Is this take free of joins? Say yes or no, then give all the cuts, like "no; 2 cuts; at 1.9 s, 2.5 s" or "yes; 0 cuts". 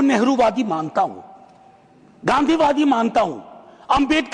yes; 0 cuts